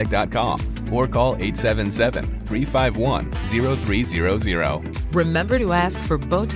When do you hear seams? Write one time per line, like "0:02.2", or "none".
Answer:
none